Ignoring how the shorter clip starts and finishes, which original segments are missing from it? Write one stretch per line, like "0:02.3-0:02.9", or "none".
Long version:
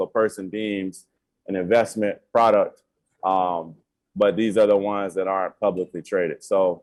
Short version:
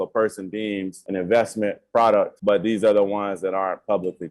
0:01.0-0:01.4
0:02.7-0:04.1

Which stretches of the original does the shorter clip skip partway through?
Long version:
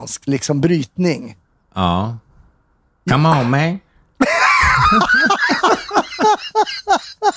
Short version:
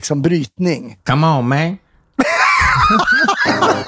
0:01.3-0:03.0

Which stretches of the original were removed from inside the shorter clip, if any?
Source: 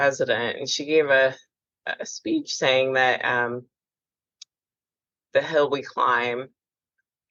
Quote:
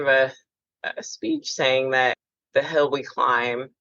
0:03.2-0:05.0

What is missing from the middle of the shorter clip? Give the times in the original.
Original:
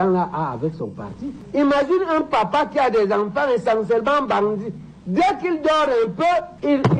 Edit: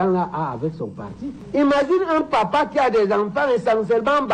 none

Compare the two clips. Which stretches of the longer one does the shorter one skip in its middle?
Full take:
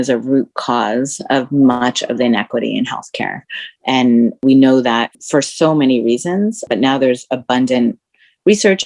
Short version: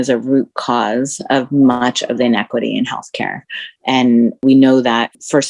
none

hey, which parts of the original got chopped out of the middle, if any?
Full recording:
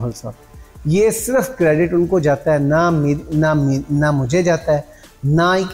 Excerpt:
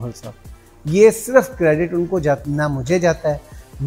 0:02.4-0:03.8

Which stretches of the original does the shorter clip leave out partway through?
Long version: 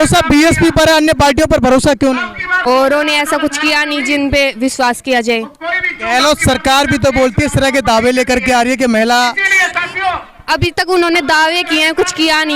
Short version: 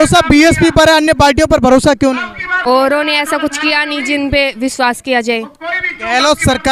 none

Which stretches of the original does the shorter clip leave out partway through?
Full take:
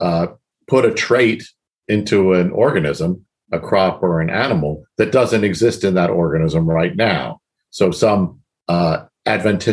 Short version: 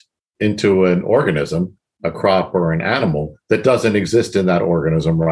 none

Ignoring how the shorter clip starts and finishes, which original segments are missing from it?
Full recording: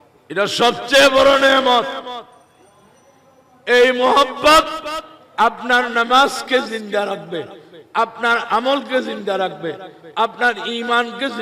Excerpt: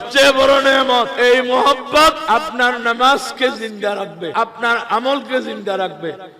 0:01.9-0:03.6
0:04.7-0:05.3
0:07.4-0:07.9

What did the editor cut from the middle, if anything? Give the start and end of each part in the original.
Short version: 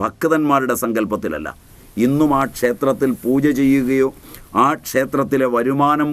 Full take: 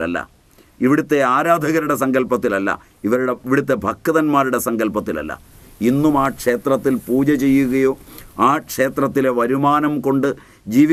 none

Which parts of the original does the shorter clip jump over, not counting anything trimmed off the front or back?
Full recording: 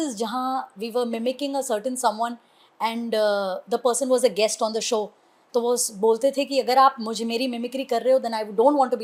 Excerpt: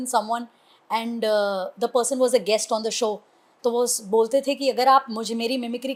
none

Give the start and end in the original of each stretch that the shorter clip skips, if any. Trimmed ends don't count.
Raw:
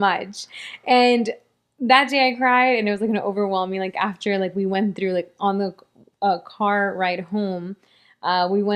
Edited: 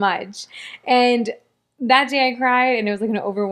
none

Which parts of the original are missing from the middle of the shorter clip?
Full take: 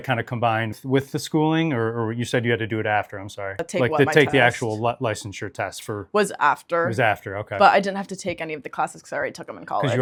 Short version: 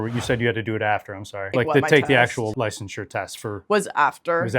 0:03.5-0:03.7
0:04.8-0:05.0

